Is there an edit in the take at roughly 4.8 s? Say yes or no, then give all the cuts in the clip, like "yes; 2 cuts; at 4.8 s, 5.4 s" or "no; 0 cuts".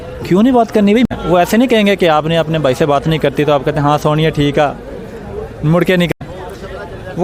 no; 2 cuts; at 1.1 s, 6.1 s